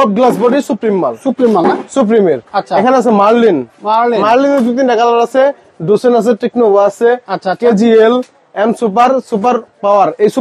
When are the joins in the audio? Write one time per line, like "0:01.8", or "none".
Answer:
none